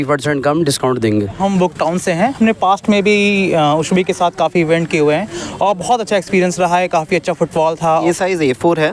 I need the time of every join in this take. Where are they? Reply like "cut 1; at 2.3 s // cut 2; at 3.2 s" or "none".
cut 1; at 1.4 s // cut 2; at 7.9 s